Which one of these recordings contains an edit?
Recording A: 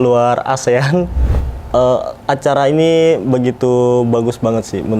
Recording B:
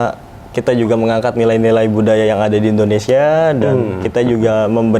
A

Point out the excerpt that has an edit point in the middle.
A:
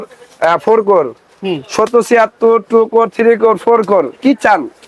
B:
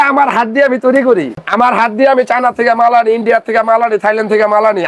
B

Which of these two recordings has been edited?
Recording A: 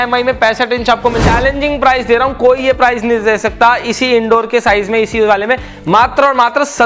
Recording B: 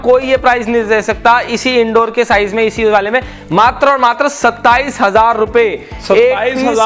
A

